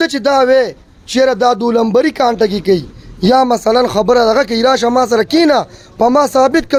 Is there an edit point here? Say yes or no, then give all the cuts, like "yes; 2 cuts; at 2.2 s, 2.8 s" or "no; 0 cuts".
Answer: no; 0 cuts